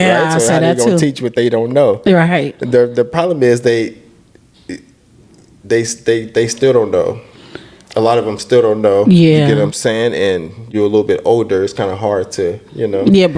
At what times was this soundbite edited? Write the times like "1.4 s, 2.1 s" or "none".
10.6 s